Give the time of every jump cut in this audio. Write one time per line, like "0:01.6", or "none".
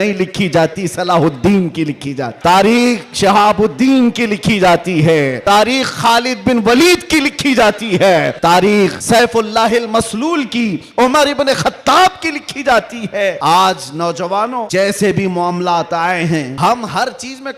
0:02.3
0:05.4
0:08.3
0:09.0
0:13.4
0:14.6
0:16.5